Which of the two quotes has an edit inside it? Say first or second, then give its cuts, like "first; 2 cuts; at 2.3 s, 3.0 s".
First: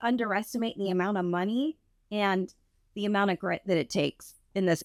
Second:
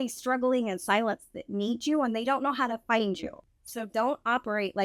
second; 1 cut; at 3.4 s